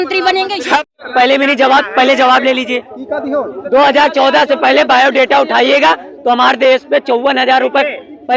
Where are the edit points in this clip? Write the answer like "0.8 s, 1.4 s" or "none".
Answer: 0.9 s